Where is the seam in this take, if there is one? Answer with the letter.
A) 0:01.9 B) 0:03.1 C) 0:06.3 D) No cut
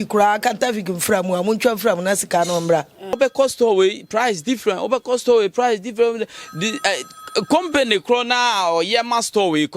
B